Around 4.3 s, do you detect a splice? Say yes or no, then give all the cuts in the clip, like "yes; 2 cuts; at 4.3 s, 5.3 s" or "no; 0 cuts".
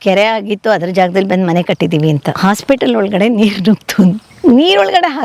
yes; 2 cuts; at 2.3 s, 4.3 s